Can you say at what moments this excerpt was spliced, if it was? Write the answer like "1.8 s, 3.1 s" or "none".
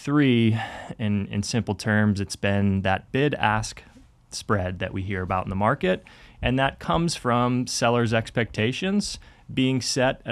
none